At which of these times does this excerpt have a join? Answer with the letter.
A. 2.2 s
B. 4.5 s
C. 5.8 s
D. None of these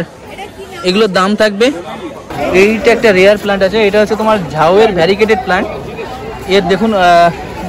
A